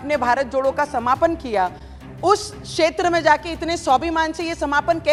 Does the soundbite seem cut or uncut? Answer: uncut